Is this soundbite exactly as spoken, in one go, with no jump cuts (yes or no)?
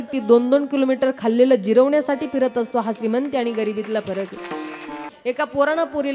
no